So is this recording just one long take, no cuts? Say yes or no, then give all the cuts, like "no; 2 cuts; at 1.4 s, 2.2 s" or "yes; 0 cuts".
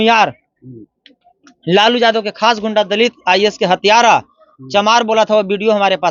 yes; 0 cuts